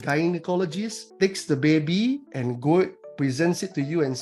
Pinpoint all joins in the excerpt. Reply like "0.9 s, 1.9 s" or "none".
1.0 s